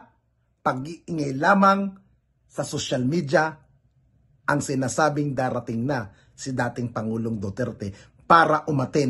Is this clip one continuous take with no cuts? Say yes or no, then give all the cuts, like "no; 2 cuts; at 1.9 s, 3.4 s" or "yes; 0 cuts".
yes; 0 cuts